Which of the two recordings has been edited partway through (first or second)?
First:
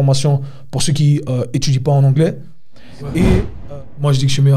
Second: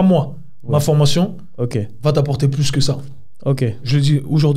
first